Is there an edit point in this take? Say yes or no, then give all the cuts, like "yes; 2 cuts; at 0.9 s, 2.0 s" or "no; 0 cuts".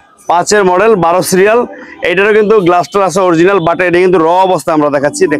no; 0 cuts